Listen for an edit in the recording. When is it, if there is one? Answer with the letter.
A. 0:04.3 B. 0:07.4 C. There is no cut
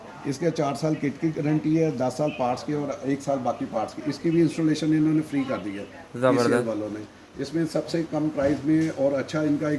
C